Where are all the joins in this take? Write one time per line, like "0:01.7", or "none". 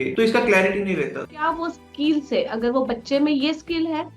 0:01.2